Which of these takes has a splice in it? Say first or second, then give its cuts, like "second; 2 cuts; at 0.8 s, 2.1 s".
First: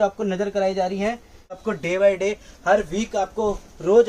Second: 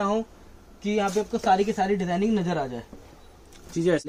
first; 1 cut; at 1.7 s